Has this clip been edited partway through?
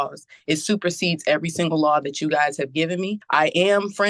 yes; 1 cut; at 3.2 s

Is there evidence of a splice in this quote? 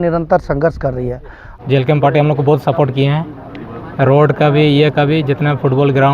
yes; 1 cut; at 1.4 s

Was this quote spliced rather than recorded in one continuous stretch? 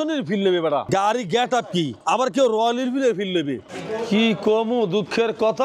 yes; 3 cuts; at 0.8 s, 1.9 s, 3.7 s

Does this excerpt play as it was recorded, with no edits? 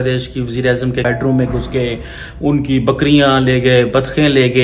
no; 1 cut; at 1.0 s

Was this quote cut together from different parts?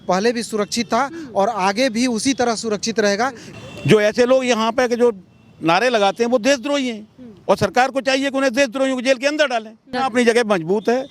yes; 2 cuts; at 3.4 s, 9.9 s

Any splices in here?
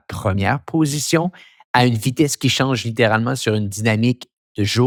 no; 0 cuts

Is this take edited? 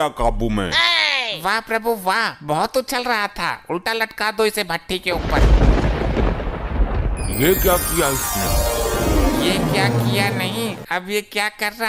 no; 0 cuts

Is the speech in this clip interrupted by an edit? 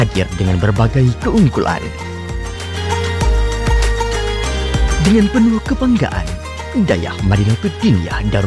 no; 0 cuts

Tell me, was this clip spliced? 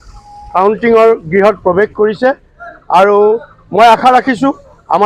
no; 0 cuts

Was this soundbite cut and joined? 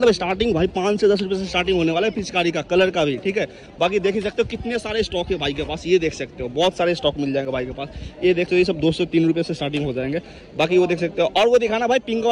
no; 0 cuts

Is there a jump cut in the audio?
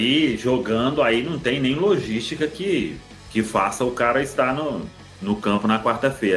no; 0 cuts

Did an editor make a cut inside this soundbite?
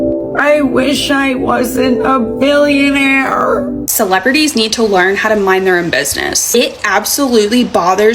yes; 1 cut; at 3.9 s

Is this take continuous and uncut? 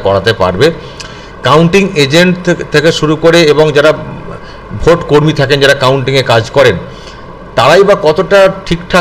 yes; 0 cuts

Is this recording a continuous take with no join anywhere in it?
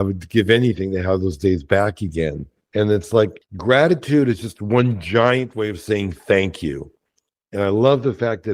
no; 1 cut; at 3.5 s

